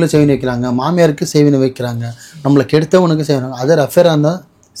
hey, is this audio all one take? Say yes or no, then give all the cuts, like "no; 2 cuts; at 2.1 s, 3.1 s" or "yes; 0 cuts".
yes; 0 cuts